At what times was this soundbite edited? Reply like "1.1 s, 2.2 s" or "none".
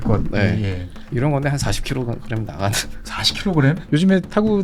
none